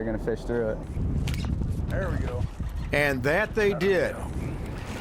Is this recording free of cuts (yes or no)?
no